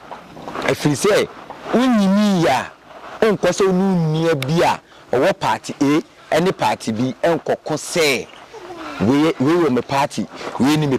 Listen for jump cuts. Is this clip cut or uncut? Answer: uncut